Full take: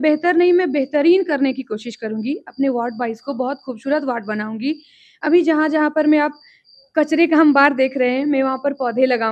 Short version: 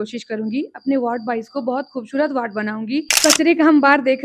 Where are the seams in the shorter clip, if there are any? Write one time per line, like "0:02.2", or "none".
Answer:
0:03.1